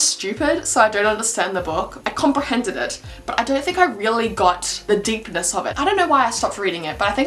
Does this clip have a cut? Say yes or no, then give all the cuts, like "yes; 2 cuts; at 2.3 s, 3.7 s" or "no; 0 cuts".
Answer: no; 0 cuts